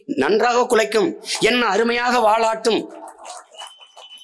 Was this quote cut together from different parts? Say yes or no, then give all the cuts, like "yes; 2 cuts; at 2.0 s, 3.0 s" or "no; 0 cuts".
no; 0 cuts